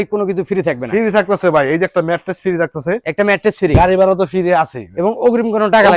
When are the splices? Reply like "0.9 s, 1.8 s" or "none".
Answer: none